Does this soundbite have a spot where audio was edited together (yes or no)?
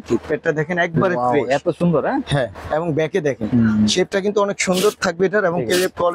no